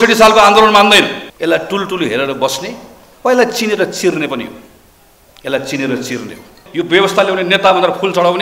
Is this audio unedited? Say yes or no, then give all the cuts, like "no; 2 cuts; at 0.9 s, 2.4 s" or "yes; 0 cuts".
no; 2 cuts; at 1.2 s, 6.6 s